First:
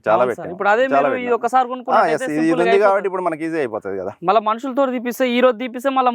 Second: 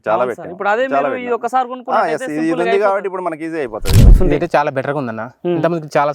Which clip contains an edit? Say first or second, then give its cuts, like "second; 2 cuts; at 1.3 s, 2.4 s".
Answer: second; 1 cut; at 4.1 s